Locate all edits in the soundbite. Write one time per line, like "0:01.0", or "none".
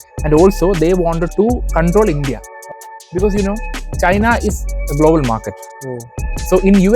0:02.6